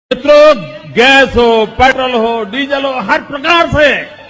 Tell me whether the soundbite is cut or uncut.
uncut